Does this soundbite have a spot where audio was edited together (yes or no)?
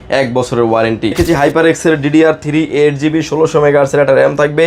yes